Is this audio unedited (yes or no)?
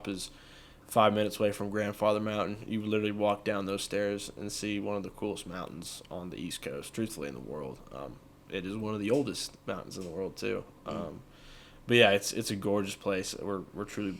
yes